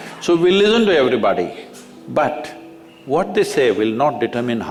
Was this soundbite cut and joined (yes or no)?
no